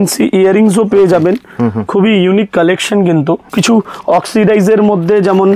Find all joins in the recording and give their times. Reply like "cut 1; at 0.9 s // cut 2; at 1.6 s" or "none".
cut 1; at 3.5 s